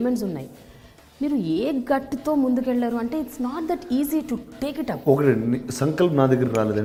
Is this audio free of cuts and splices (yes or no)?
yes